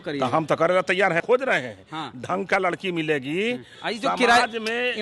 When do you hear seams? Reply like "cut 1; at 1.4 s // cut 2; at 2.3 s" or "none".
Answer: cut 1; at 1.2 s // cut 2; at 3.7 s

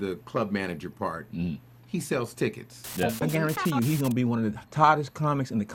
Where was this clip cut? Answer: cut 1; at 3.2 s

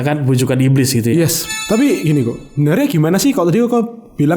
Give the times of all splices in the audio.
cut 1; at 1.4 s

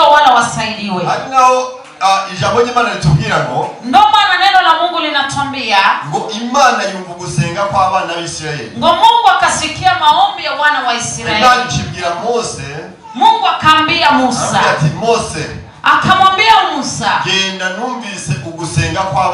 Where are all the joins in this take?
none

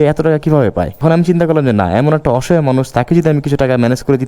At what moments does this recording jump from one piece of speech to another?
cut 1; at 0.9 s

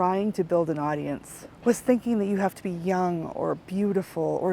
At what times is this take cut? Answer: cut 1; at 1.4 s

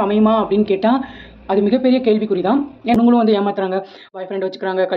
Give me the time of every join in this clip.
cut 1; at 2.9 s

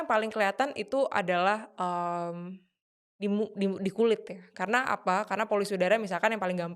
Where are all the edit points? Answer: none

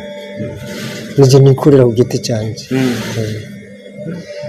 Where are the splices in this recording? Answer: none

